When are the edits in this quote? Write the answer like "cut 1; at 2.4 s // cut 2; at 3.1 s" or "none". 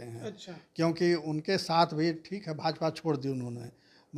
none